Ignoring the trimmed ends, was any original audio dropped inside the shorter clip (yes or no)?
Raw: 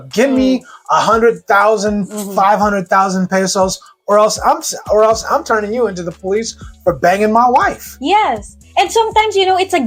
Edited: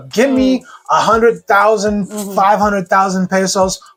no